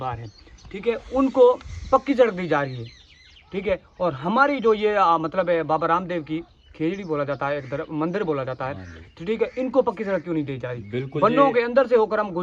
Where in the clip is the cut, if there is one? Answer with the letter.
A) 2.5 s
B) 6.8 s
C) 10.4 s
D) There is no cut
D